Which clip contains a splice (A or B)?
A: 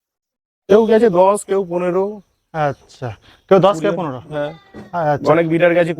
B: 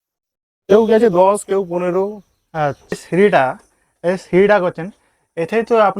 B